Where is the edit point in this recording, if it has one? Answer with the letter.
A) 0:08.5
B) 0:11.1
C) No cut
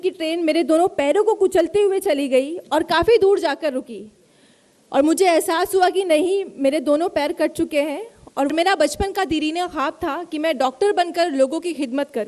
A